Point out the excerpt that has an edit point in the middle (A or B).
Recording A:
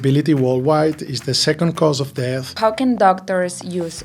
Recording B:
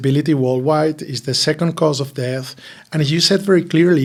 A